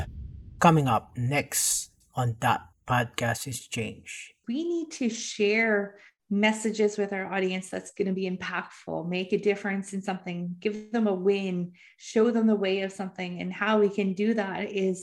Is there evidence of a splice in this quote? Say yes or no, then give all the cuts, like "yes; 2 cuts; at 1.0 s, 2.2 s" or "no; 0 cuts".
yes; 1 cut; at 4.4 s